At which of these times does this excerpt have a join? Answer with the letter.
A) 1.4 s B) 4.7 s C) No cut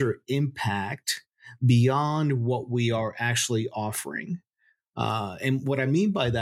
C